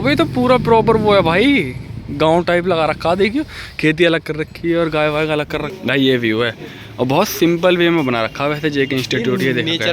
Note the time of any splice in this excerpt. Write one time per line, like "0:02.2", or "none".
0:05.7